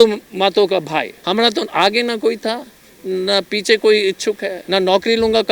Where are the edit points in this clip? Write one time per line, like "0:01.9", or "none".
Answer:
0:01.2
0:04.5

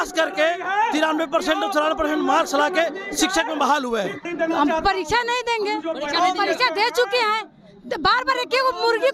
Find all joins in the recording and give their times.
0:04.2

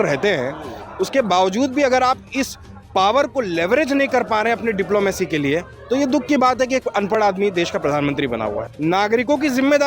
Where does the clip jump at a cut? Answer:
0:08.6

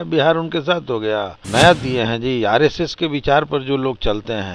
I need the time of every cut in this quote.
0:01.4

